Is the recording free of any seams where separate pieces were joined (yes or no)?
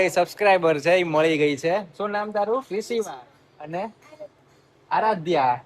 yes